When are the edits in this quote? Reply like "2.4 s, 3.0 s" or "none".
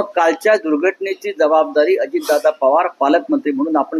none